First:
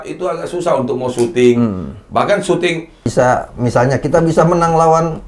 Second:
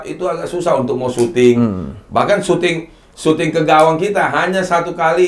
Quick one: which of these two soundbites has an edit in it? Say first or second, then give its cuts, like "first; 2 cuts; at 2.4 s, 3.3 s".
first; 1 cut; at 3.1 s